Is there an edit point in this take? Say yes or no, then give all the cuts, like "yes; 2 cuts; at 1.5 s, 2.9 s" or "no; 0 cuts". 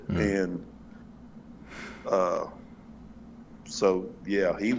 no; 0 cuts